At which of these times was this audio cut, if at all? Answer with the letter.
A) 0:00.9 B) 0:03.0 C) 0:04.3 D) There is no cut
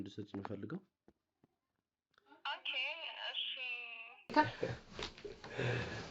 C